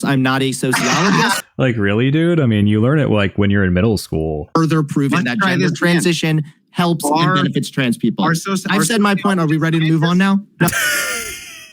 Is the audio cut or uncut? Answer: cut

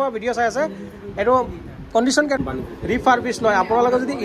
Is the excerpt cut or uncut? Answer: cut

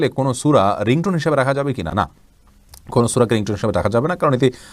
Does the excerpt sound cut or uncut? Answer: uncut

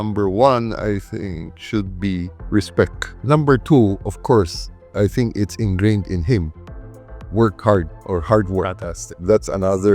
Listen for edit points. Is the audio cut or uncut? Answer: cut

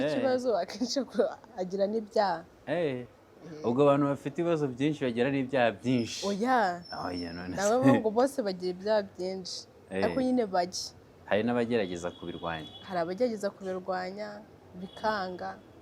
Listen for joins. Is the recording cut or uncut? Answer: uncut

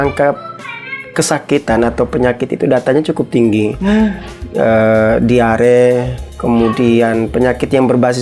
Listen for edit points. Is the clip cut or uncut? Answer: uncut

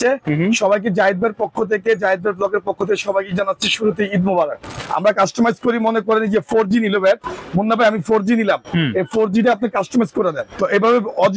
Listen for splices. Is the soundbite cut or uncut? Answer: cut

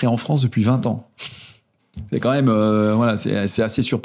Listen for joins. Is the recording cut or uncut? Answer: uncut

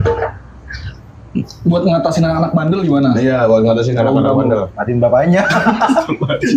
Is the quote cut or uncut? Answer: uncut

